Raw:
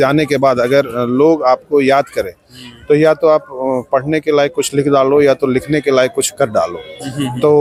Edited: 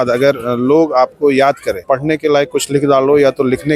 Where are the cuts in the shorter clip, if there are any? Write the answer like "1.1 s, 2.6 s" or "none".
1.8 s